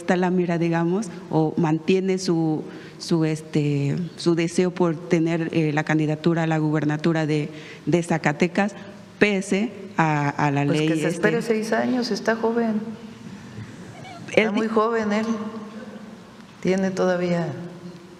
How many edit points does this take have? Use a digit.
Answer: 0